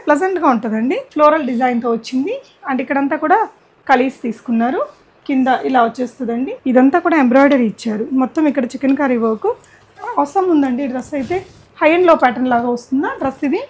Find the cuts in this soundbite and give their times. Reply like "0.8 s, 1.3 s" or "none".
1.0 s, 3.7 s, 6.5 s